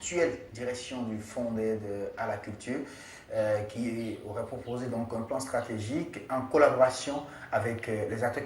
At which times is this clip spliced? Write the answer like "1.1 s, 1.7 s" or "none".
5.1 s